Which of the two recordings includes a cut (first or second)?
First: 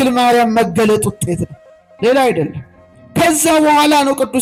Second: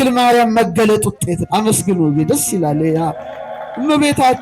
second